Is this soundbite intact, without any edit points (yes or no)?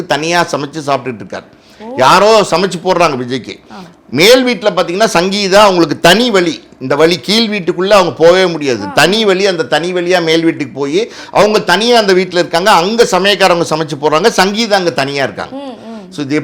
yes